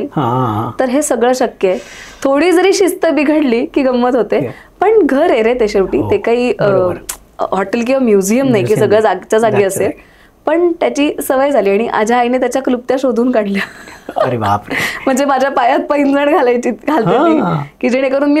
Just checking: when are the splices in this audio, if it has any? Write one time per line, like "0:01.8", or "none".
none